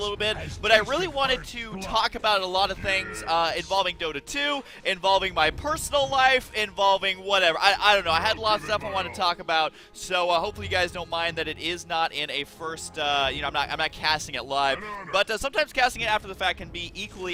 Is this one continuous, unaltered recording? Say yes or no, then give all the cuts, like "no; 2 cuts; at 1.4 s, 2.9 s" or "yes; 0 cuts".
yes; 0 cuts